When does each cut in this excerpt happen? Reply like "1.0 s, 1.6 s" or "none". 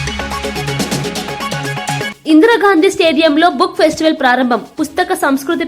2.1 s